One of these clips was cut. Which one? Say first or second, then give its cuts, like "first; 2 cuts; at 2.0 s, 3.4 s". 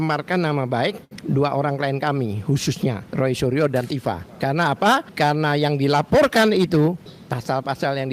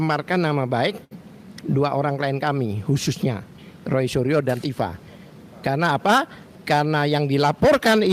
first; 5 cuts; at 1.1 s, 3.0 s, 4.3 s, 5.1 s, 7.1 s